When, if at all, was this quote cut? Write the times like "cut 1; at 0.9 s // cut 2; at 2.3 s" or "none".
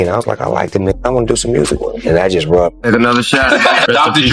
cut 1; at 2.8 s